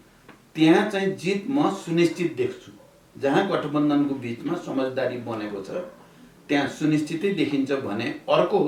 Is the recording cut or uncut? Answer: uncut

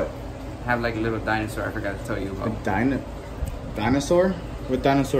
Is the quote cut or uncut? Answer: uncut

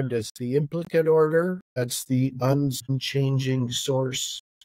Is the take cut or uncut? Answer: cut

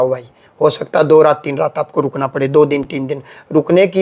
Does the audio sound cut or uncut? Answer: uncut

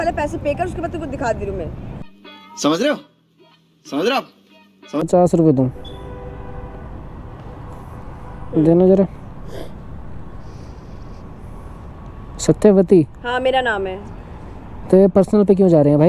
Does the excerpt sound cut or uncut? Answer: cut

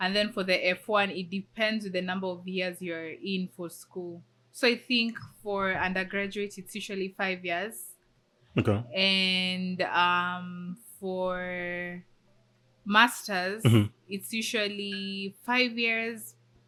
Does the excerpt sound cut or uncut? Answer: uncut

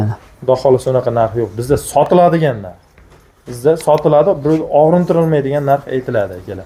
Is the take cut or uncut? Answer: uncut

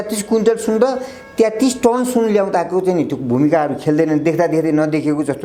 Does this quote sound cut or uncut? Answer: uncut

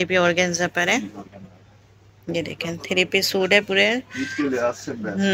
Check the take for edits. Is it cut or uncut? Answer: uncut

